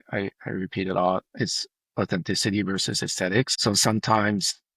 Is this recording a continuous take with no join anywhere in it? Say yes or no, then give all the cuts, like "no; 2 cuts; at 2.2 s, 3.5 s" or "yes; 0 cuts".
no; 1 cut; at 3.5 s